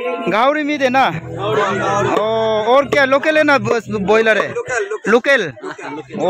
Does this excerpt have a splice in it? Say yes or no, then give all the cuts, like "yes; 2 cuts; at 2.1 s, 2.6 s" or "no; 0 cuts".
no; 0 cuts